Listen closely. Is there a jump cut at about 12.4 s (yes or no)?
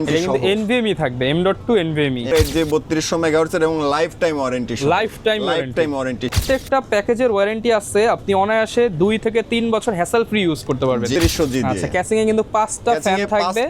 no